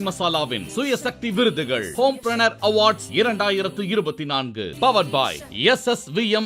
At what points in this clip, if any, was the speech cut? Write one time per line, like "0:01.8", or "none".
none